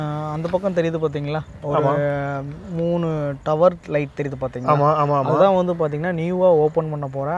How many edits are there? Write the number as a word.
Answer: zero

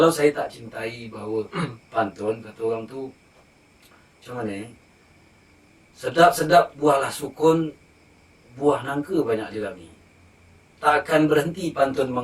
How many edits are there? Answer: zero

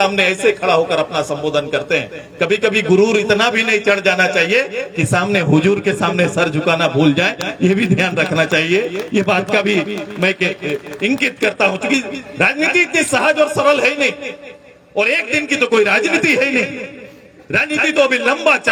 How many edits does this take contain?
zero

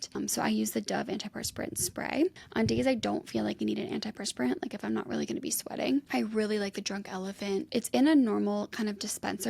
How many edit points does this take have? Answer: two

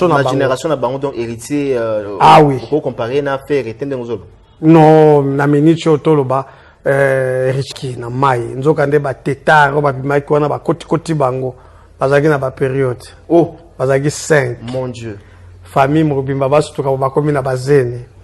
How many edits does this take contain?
one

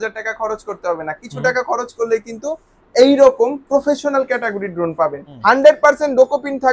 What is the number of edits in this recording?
one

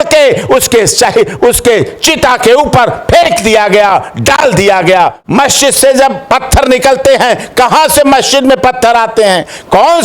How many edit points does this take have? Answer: one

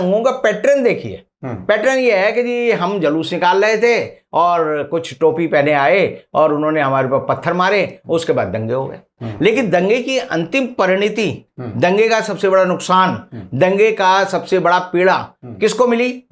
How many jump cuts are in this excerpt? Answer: zero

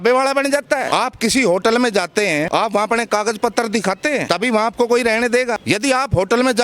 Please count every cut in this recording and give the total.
four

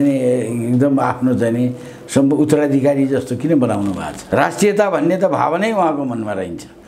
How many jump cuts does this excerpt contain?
one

